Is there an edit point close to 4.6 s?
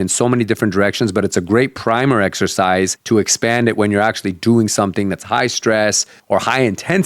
no; 2 cuts; at 3.0 s, 6.1 s

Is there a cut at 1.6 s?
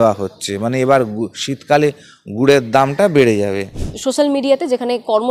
no; 1 cut; at 3.8 s

